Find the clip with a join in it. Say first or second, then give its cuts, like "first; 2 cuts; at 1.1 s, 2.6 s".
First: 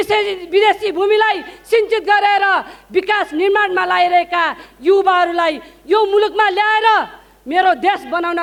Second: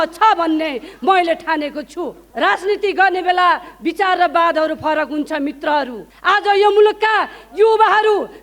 second; 2 cuts; at 2.2 s, 6.0 s